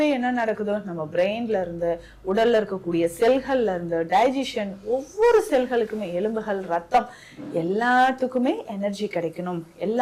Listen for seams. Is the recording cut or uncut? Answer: uncut